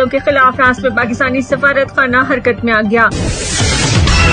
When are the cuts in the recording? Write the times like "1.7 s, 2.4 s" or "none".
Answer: 3.1 s

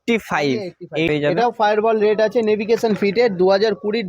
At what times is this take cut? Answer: 1.1 s

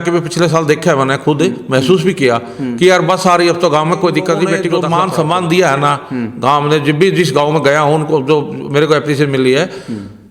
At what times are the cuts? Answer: 4.7 s

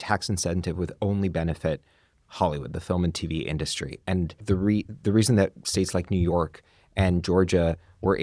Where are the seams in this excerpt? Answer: 4.3 s

